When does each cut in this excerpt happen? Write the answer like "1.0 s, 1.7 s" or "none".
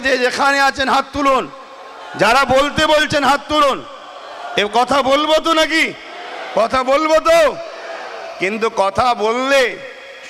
none